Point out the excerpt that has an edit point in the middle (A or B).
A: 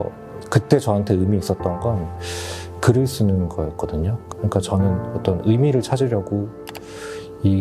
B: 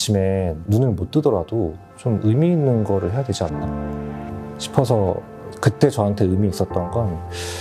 A